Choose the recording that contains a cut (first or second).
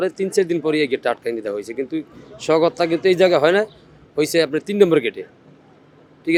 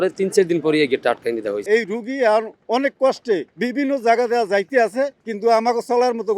second